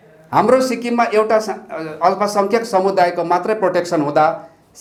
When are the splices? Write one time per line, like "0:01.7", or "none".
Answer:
none